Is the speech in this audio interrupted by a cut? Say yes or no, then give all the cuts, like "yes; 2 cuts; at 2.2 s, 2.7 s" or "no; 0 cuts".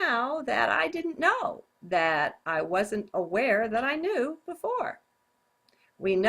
yes; 1 cut; at 3.7 s